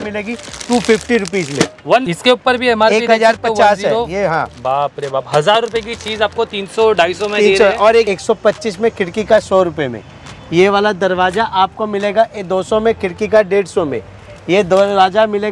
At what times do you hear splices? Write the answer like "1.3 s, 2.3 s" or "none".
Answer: 2.0 s, 8.1 s